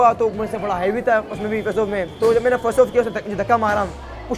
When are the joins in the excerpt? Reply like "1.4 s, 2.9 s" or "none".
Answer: 2.1 s